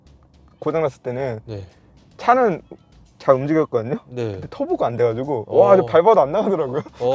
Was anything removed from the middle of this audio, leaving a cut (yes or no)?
no